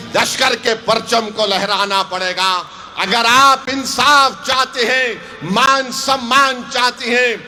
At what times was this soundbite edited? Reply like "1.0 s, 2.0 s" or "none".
none

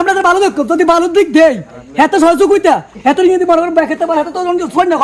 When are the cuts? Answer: none

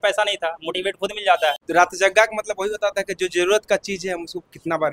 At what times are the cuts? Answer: 1.6 s

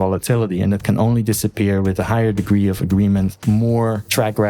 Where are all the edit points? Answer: 3.4 s

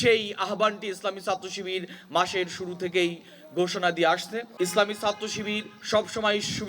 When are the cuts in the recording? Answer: 4.4 s

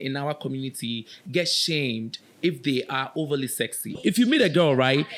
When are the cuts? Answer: 4.0 s

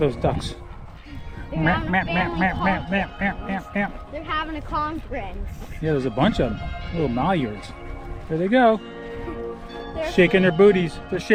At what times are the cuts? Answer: none

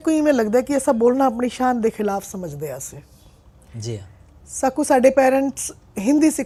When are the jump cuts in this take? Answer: none

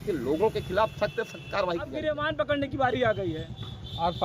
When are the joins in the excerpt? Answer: 2.0 s

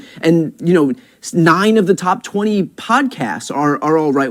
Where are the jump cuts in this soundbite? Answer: none

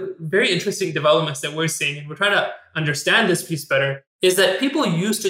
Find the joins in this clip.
4.0 s

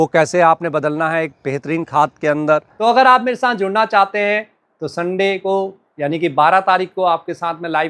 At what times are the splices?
2.7 s

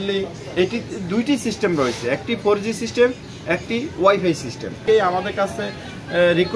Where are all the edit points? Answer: 4.8 s

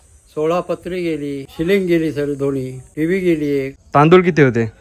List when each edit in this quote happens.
1.4 s, 2.8 s, 3.8 s

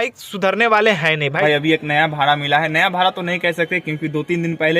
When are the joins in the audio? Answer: 1.4 s

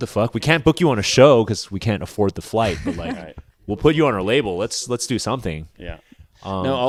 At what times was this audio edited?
none

